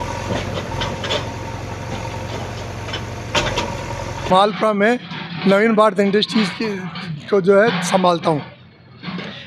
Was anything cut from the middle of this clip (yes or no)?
yes